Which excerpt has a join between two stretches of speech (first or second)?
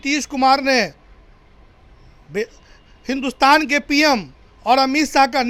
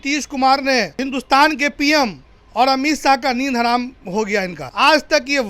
second